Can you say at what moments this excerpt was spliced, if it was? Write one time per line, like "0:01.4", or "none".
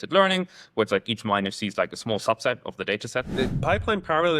0:03.3